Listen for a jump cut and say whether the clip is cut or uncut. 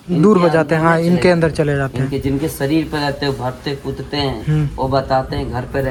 uncut